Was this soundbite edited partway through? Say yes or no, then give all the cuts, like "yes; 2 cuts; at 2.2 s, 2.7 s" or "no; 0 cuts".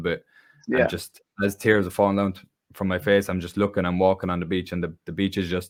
no; 0 cuts